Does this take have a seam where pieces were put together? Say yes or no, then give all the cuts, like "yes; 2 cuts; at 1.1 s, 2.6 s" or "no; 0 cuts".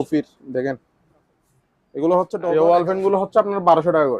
yes; 1 cut; at 2.5 s